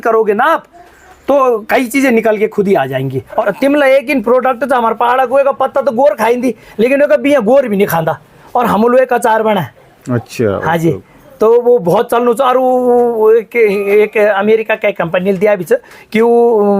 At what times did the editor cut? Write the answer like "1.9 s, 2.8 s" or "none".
3.3 s